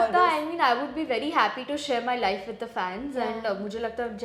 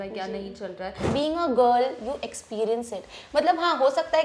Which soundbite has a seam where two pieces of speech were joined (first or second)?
second